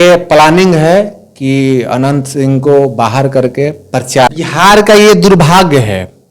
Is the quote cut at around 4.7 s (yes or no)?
yes